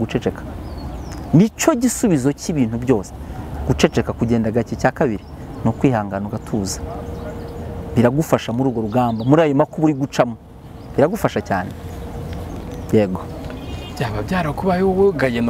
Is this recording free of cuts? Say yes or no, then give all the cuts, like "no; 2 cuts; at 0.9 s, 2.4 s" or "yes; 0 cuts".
yes; 0 cuts